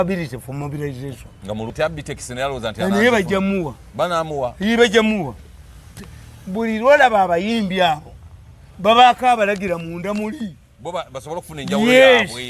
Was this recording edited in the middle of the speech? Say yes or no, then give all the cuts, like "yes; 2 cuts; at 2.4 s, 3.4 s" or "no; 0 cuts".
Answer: yes; 1 cut; at 1.7 s